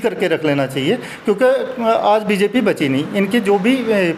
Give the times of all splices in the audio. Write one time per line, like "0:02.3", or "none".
none